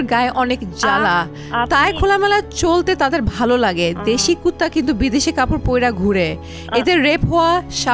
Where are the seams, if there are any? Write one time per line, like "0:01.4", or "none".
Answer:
none

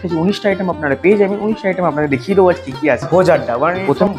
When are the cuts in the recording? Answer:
0:03.1

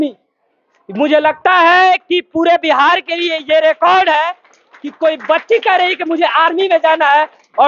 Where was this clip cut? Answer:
none

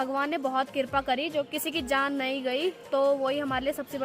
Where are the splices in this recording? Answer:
0:01.5

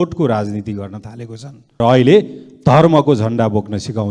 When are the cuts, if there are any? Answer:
0:01.6

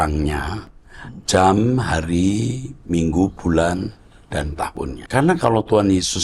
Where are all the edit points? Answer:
0:05.0

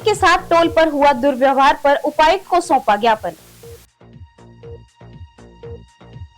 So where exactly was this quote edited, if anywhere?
0:03.5

